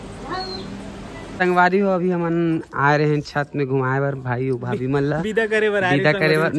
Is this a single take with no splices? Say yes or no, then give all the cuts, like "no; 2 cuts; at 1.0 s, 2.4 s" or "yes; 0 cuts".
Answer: no; 1 cut; at 1.3 s